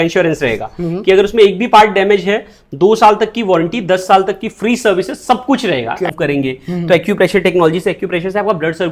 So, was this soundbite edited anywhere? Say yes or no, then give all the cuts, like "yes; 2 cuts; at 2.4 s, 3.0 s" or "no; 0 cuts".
yes; 1 cut; at 6.1 s